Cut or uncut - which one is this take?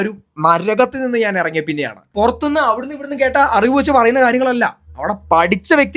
cut